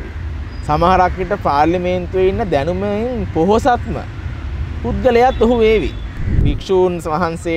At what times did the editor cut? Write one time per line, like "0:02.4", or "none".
0:06.3